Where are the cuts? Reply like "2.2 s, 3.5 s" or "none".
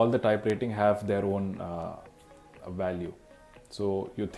none